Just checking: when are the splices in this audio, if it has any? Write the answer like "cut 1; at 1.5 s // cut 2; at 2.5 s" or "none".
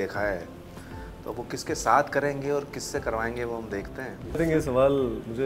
cut 1; at 4.4 s